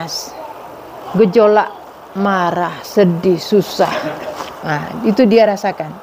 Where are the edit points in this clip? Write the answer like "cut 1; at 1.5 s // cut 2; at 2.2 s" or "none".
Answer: none

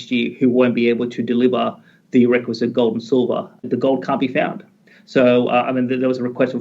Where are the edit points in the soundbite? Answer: cut 1; at 3.6 s

